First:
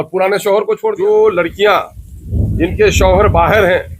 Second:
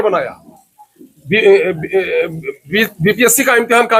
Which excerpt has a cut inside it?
first; 1 cut; at 1.0 s

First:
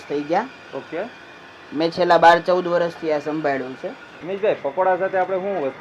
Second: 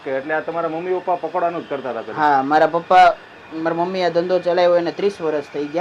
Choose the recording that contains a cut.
first; 1 cut; at 4.1 s

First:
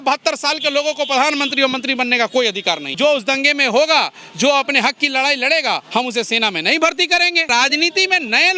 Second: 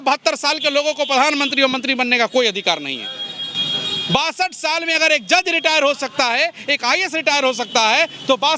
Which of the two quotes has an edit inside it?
first; 2 cuts; at 3.0 s, 7.5 s

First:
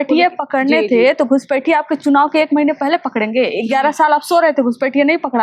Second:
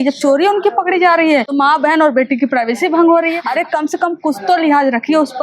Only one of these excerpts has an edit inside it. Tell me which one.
second; 2 cuts; at 1.5 s, 3.4 s

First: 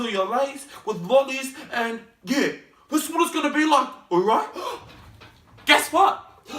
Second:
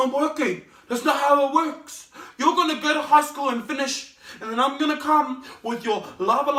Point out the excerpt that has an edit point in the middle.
first; 1 cut; at 4.7 s

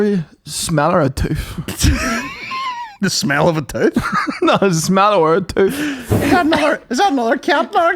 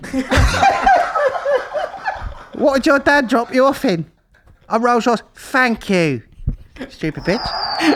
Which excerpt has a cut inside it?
first; 1 cut; at 6.0 s

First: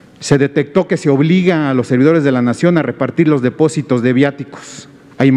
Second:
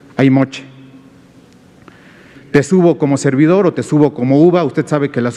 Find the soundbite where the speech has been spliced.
second; 1 cut; at 2.3 s

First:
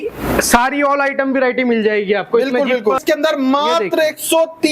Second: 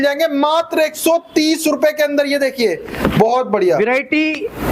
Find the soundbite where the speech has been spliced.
first; 1 cut; at 3.0 s

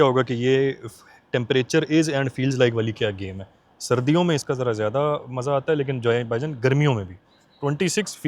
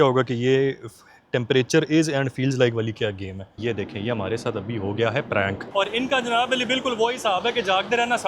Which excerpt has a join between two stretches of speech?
second; 2 cuts; at 3.5 s, 5.6 s

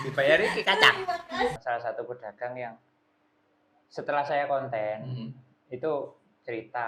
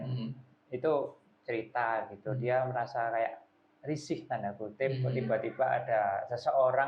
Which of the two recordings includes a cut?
first; 1 cut; at 1.5 s

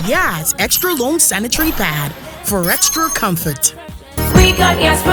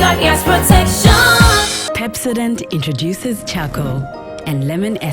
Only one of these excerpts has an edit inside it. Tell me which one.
second; 1 cut; at 1.8 s

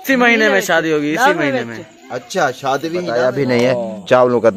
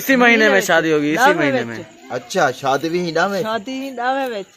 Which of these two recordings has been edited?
first; 1 cut; at 3.1 s

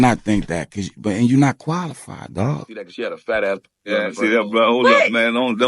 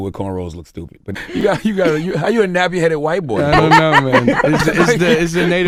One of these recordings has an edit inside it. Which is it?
first; 1 cut; at 2.9 s

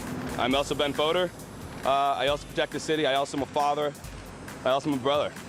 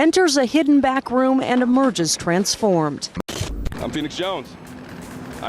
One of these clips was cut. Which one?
second; 1 cut; at 3.2 s

